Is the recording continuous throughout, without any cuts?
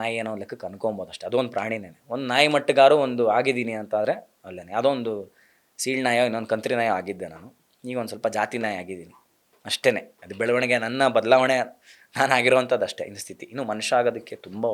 yes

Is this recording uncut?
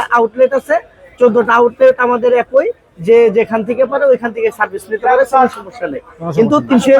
yes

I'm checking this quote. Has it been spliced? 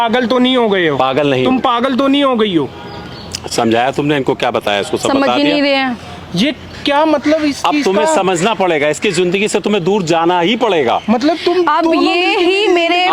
no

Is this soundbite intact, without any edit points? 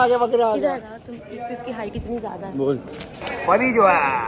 no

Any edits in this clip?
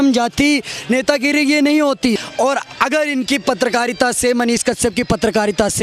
yes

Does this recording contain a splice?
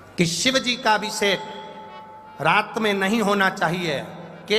no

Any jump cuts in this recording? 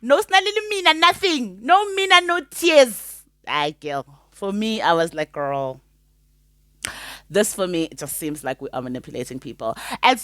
no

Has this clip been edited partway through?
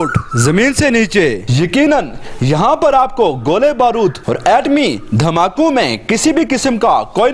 no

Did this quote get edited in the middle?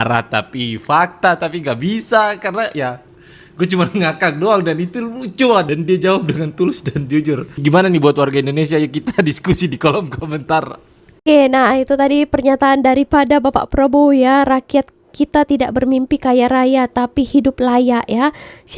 no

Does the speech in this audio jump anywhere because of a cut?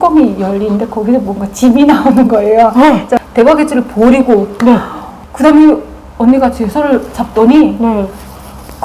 yes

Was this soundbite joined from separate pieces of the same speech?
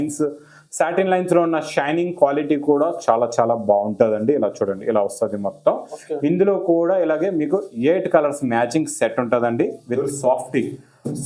yes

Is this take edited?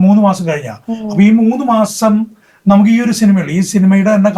no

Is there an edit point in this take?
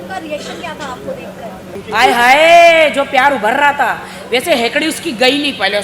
yes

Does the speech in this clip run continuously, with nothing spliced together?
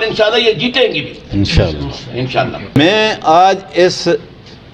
no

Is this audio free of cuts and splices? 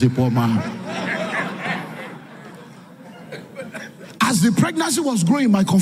yes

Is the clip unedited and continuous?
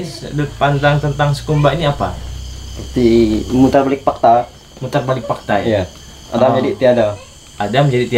yes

